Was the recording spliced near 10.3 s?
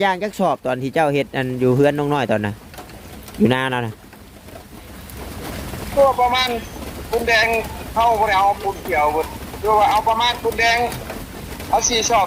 no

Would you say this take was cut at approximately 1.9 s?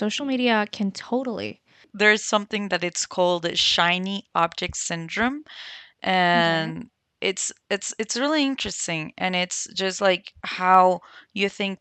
yes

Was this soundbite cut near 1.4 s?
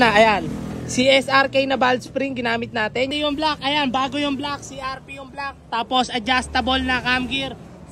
no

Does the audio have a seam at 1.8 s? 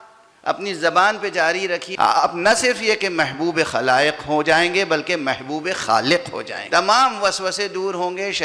yes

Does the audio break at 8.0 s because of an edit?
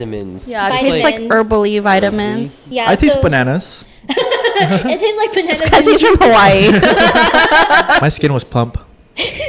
yes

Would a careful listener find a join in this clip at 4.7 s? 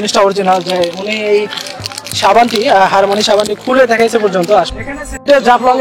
yes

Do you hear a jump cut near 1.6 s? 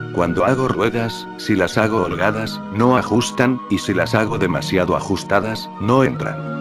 no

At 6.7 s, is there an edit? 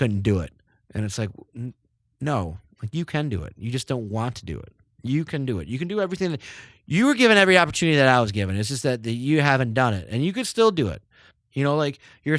no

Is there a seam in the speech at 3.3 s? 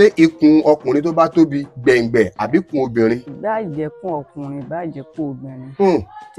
yes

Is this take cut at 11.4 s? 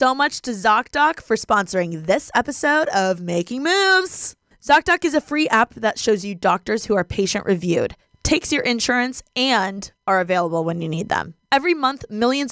no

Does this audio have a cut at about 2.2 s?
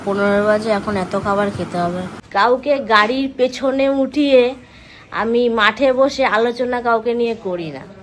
yes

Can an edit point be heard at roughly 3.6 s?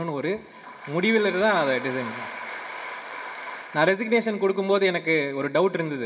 yes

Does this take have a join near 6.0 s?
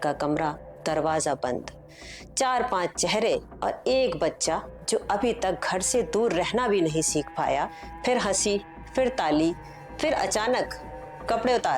no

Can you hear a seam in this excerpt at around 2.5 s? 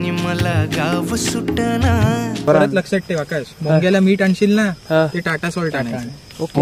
yes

